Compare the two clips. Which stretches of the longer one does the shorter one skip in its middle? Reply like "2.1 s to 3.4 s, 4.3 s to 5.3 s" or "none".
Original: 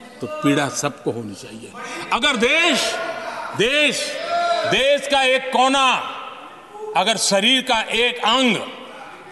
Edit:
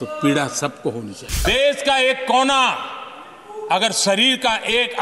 1.6 s to 4.7 s